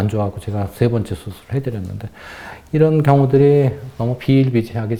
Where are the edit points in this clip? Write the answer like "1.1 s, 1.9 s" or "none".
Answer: none

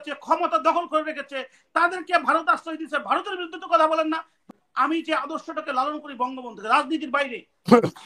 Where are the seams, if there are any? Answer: 4.4 s

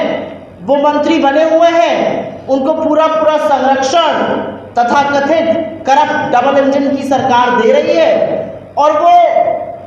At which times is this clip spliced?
none

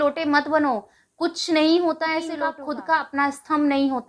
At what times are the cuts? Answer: 2.4 s

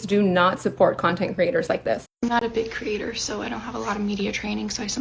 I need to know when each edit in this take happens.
2.1 s

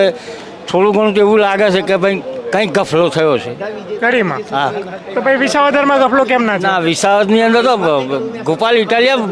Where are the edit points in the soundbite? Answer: none

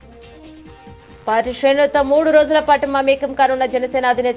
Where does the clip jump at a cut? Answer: 1.2 s

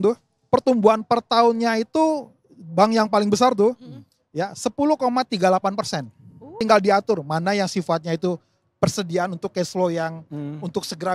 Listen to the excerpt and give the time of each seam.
6.4 s

